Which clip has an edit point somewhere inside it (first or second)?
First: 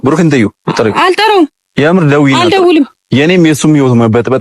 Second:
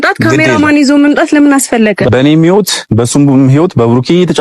second